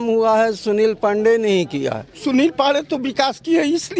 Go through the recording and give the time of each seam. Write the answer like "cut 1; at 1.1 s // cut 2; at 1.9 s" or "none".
cut 1; at 2.2 s